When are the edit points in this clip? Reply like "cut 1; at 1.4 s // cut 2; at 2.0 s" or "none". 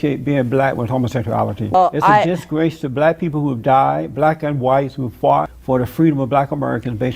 cut 1; at 1.7 s // cut 2; at 5.5 s

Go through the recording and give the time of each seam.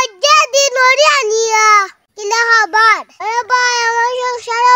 cut 1; at 3.2 s

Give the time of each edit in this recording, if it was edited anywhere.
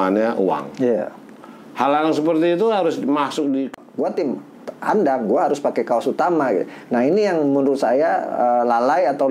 cut 1; at 3.7 s

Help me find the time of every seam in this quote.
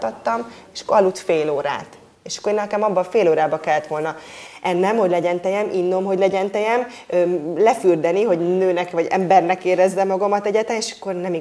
none

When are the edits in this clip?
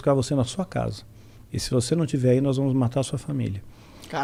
none

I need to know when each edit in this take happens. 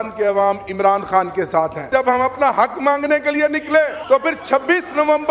cut 1; at 1.9 s // cut 2; at 4.0 s

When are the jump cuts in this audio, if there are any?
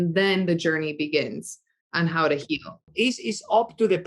cut 1; at 2.9 s

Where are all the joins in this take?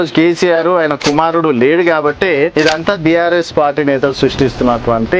cut 1; at 1.0 s // cut 2; at 2.5 s

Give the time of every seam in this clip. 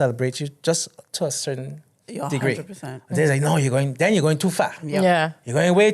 none

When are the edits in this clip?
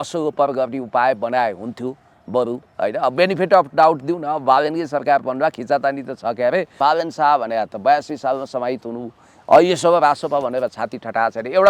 cut 1; at 6.7 s

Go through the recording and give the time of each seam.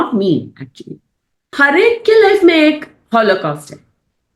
cut 1; at 1.5 s

